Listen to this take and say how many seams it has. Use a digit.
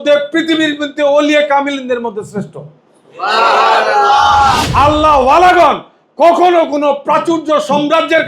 1